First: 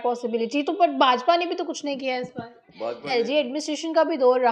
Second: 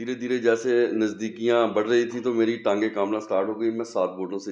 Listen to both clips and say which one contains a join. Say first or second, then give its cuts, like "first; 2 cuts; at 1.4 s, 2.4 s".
first; 1 cut; at 3.0 s